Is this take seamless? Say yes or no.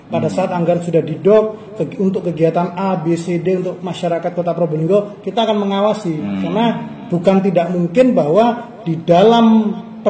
yes